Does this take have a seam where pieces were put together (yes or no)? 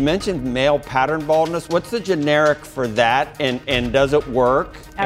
yes